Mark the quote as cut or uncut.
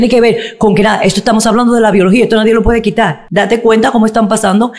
cut